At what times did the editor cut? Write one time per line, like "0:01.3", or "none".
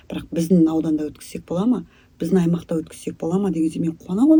none